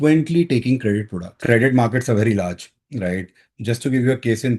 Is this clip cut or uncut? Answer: cut